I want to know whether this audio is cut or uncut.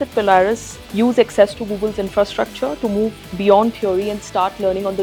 uncut